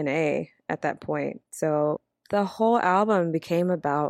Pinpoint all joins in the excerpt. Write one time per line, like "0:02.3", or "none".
0:01.4
0:02.0